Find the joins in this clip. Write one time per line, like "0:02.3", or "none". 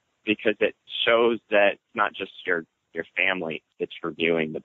0:00.9
0:01.9
0:03.7